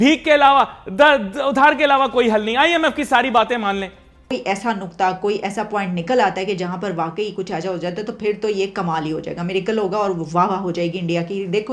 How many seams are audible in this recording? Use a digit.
1